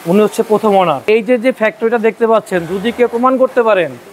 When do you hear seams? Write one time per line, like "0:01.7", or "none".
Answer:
0:01.0